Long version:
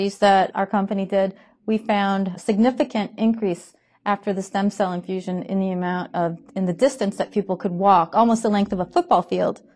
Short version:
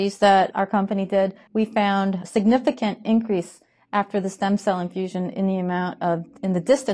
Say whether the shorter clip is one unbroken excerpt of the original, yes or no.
no